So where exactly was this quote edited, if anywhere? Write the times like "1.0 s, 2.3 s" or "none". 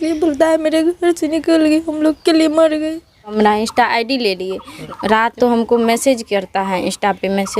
3.3 s, 5.1 s